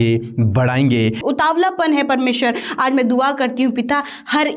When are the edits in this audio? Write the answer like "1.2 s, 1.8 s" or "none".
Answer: 1.2 s